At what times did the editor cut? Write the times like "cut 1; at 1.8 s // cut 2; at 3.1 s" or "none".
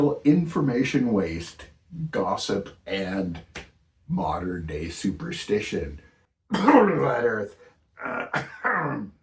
none